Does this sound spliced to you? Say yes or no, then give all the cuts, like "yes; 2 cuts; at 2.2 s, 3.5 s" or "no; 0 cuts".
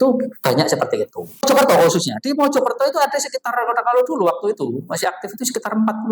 yes; 1 cut; at 1.5 s